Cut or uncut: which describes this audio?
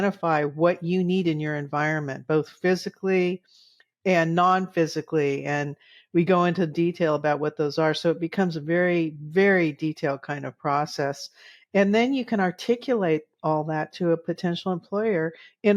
uncut